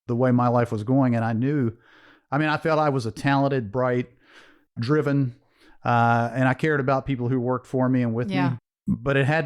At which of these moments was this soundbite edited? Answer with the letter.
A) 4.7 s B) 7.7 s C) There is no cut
A